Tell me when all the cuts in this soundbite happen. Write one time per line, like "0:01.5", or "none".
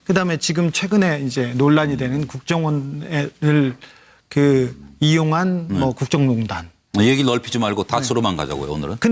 0:08.0